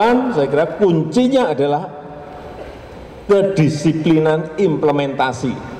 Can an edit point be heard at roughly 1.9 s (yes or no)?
no